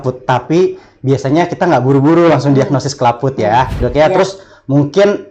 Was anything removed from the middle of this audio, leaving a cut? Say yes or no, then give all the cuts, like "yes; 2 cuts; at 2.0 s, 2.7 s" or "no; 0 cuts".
yes; 1 cut; at 3.8 s